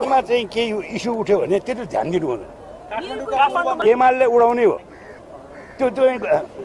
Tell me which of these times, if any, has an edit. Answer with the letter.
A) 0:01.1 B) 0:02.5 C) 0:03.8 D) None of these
C